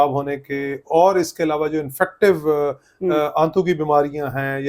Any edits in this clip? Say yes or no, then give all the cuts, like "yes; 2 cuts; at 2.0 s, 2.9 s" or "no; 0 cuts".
no; 0 cuts